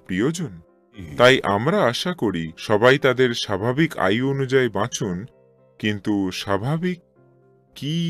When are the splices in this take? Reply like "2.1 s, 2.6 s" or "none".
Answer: 1.1 s